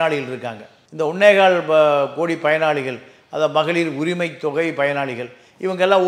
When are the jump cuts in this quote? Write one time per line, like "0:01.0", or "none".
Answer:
none